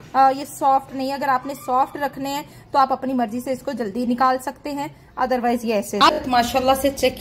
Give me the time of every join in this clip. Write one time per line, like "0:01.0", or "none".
0:06.2